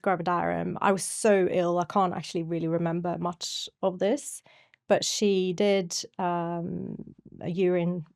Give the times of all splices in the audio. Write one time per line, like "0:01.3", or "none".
none